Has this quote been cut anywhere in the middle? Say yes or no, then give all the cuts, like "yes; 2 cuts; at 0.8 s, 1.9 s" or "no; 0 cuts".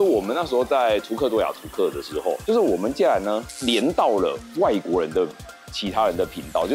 no; 0 cuts